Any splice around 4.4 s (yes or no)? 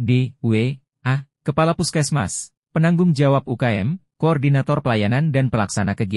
yes